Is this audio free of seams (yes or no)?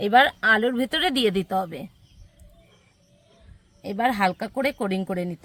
yes